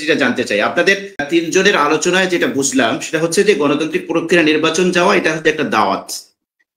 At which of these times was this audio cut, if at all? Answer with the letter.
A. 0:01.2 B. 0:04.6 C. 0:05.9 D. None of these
A